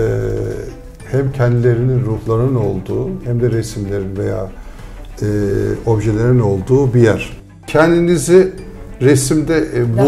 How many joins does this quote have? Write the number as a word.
one